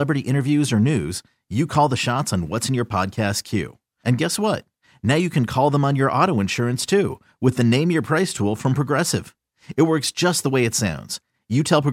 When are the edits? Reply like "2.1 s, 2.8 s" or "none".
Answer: none